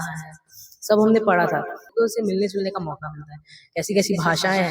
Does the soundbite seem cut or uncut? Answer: cut